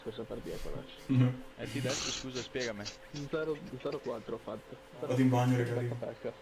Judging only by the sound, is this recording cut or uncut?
cut